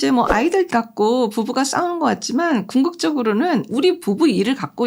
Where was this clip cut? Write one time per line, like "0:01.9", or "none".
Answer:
0:03.7